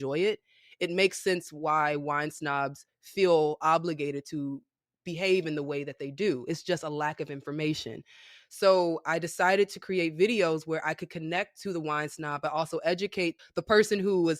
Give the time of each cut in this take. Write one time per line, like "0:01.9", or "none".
0:13.4